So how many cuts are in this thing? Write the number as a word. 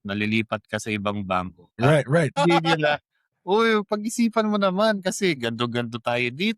two